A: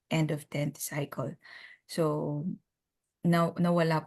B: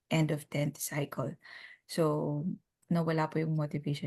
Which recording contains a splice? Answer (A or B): B